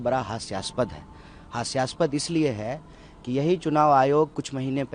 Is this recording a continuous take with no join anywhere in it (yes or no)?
yes